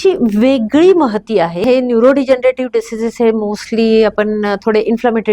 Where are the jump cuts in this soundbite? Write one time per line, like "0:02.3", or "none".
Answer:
0:01.6